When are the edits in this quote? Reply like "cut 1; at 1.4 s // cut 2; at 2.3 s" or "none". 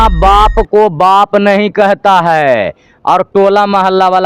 none